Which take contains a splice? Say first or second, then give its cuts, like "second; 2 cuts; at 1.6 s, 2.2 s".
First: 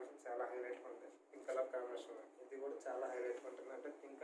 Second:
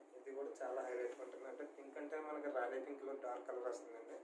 first; 1 cut; at 1.3 s